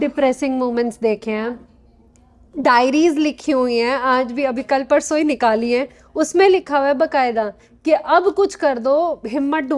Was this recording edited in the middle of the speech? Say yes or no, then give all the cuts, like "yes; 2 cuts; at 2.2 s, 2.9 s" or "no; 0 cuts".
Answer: no; 0 cuts